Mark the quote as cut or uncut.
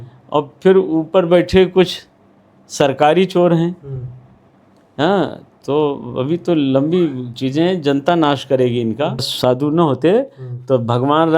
cut